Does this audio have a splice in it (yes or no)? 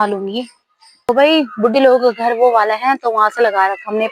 yes